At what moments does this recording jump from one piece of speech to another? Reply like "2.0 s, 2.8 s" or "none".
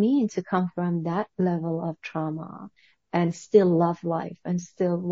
none